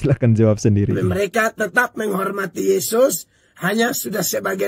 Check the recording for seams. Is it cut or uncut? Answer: cut